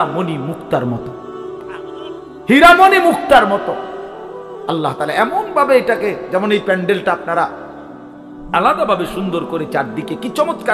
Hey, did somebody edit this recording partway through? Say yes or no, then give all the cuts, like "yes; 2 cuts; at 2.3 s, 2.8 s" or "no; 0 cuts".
no; 0 cuts